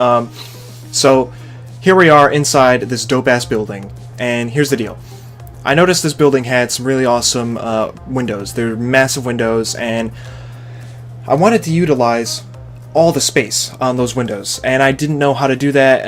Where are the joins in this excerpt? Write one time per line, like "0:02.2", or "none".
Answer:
none